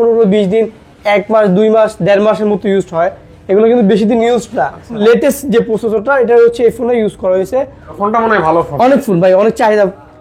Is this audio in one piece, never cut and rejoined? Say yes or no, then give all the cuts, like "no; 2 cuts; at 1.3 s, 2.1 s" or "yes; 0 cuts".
no; 2 cuts; at 5.0 s, 7.9 s